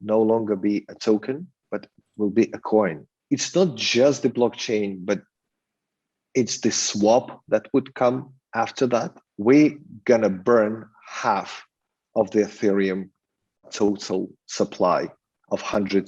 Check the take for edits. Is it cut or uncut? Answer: cut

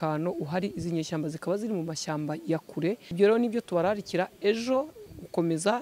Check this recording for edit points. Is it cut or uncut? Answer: cut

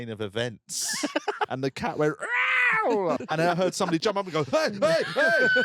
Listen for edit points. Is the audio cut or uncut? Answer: cut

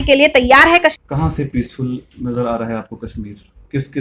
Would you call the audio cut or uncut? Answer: cut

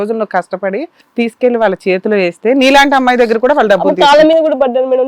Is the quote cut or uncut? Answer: cut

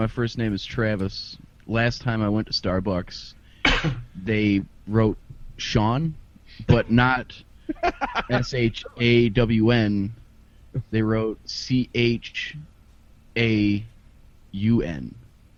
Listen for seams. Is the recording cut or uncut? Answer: uncut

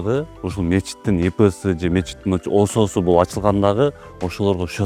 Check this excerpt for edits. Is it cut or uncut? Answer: uncut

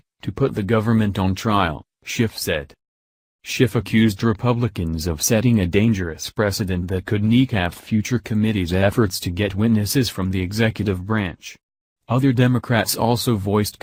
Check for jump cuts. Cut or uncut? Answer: uncut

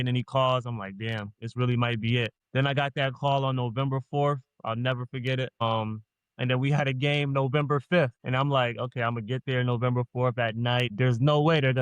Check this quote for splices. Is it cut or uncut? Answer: cut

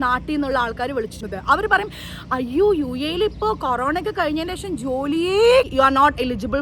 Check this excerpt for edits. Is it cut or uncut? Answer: cut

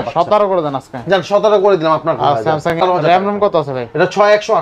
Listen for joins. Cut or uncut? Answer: cut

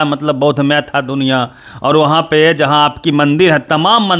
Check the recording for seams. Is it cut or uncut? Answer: uncut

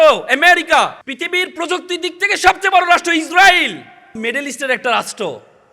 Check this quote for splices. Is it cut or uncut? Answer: cut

